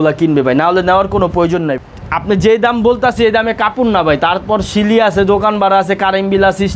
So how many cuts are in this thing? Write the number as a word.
one